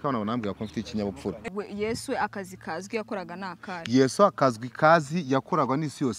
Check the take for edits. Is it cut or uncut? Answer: cut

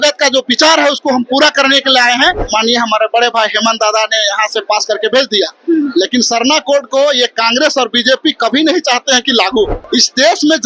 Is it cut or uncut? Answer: cut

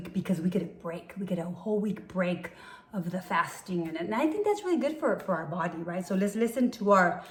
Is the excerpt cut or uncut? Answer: uncut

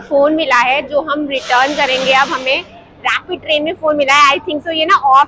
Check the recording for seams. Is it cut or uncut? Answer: uncut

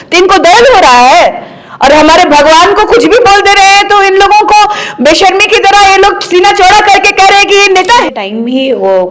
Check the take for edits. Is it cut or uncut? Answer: cut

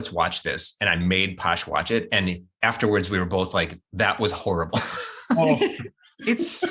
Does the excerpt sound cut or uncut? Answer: uncut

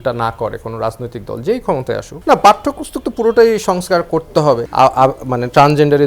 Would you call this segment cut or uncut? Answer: cut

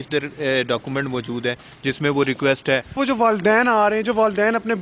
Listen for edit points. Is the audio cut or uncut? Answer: cut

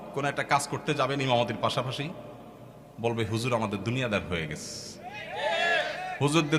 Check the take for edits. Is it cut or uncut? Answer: uncut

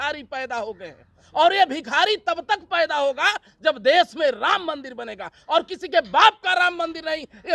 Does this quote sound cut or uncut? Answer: uncut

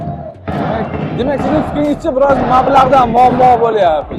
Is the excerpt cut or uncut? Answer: uncut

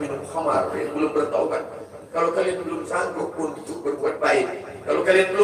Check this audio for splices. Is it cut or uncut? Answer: uncut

